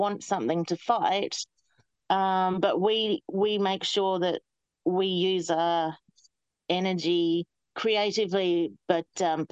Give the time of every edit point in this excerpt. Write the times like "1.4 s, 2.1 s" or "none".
7.7 s